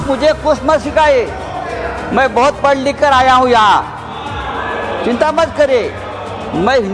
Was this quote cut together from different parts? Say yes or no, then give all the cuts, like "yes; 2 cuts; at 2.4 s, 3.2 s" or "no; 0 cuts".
no; 0 cuts